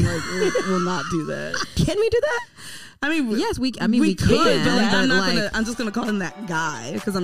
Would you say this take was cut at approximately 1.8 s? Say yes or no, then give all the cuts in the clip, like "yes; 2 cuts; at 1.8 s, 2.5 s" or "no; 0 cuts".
yes; 1 cut; at 1.8 s